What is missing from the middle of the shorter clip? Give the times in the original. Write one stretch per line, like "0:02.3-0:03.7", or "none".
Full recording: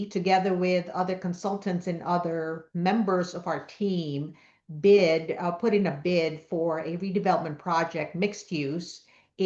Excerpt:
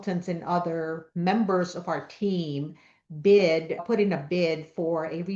0:05.4-0:05.5